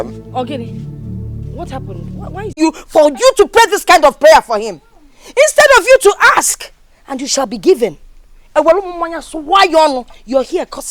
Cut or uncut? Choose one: cut